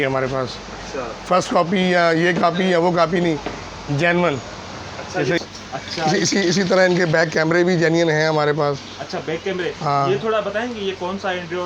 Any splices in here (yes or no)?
yes